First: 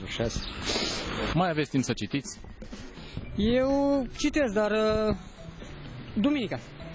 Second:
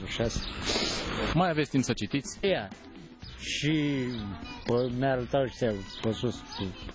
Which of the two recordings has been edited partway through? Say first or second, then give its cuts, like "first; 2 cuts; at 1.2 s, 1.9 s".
first; 1 cut; at 2.3 s